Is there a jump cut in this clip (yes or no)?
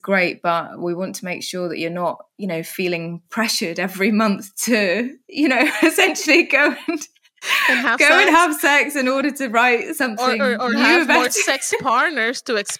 no